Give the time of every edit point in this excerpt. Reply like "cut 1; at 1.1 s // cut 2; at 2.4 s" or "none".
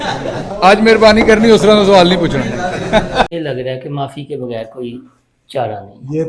cut 1; at 3.3 s